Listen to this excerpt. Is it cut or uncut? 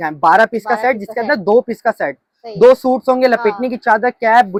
uncut